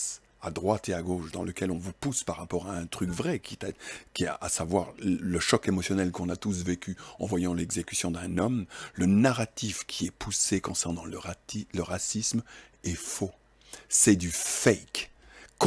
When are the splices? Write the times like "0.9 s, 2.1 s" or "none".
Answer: none